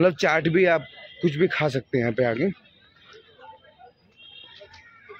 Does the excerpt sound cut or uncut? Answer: uncut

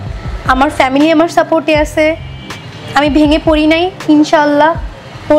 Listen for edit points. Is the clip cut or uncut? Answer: uncut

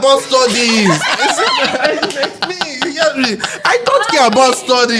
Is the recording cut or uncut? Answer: uncut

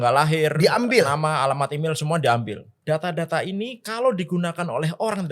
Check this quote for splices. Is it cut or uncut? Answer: cut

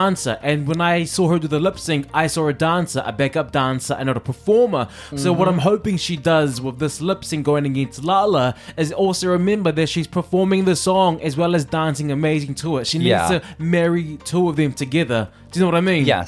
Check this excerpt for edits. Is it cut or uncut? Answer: uncut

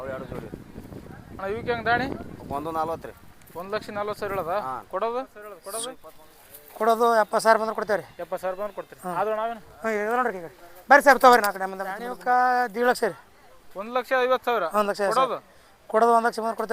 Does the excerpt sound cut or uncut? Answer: cut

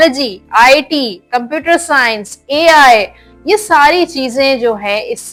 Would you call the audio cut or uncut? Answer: uncut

